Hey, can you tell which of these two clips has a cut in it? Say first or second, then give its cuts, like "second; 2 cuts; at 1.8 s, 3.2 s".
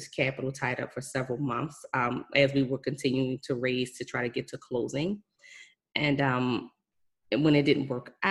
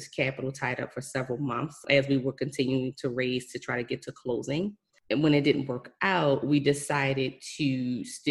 second; 2 cuts; at 1.8 s, 4.9 s